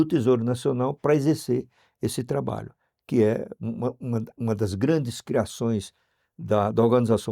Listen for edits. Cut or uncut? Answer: uncut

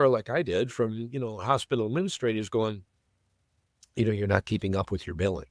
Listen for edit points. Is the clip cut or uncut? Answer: uncut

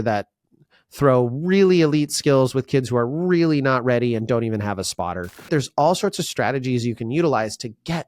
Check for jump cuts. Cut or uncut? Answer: cut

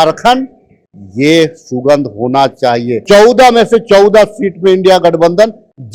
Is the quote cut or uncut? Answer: cut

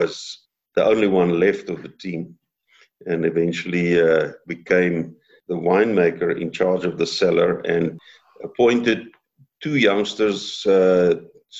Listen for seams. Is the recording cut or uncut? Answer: cut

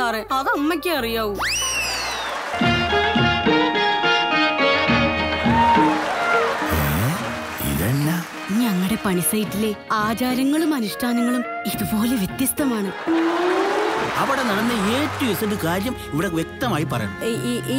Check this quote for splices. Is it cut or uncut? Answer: uncut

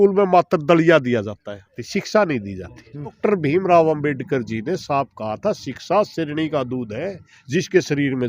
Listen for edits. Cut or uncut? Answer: cut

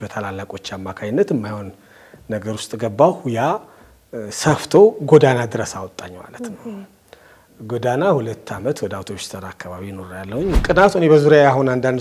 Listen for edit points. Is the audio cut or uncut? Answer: cut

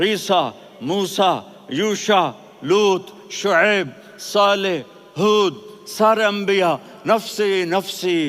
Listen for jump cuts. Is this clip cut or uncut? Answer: uncut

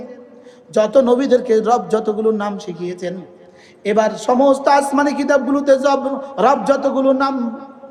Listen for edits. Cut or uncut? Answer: uncut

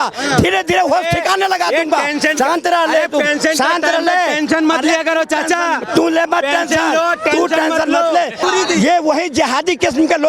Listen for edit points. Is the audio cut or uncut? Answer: cut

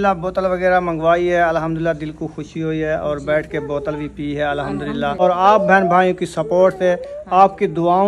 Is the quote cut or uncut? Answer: cut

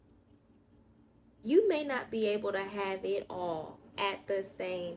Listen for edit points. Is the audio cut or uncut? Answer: uncut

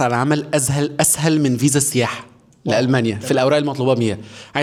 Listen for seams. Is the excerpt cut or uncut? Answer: uncut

